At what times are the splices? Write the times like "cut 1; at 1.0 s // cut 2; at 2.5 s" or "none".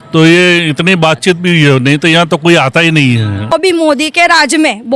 cut 1; at 3.5 s

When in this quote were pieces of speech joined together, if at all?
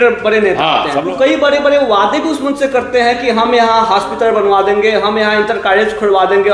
cut 1; at 1.1 s

